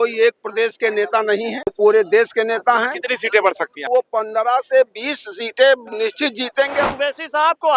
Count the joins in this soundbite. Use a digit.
3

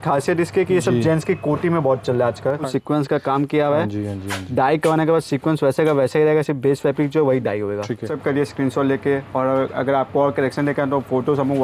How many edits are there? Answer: 2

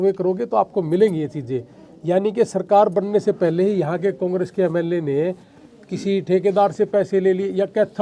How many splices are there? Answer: 0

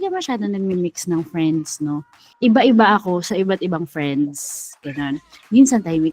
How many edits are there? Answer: 1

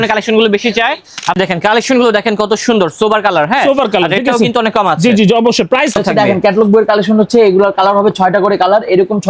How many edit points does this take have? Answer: 2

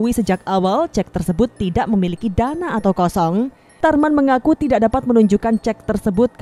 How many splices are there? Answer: 1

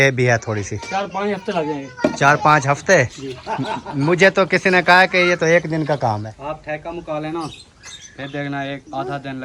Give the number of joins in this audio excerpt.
1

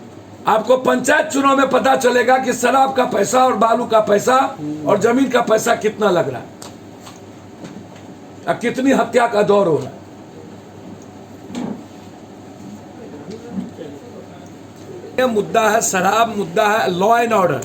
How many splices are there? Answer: 1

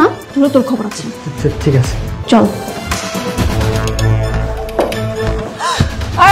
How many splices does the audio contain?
3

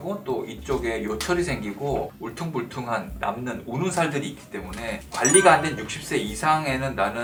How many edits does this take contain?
0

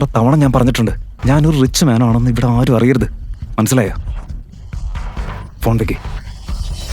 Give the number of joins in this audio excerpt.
1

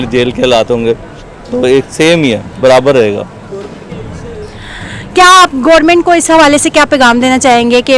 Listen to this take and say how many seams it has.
0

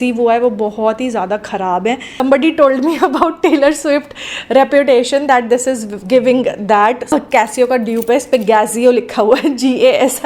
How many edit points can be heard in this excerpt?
2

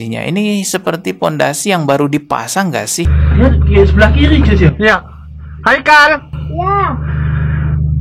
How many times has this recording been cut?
1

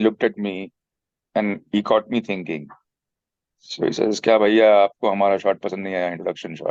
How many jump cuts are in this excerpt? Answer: 0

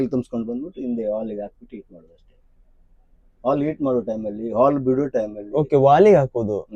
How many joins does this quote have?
0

